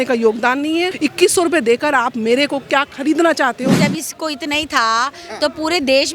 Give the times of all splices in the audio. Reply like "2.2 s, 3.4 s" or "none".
0.9 s, 3.8 s